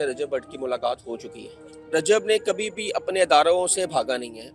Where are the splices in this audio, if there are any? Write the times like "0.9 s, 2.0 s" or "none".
1.7 s